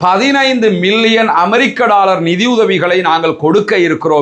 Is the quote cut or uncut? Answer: uncut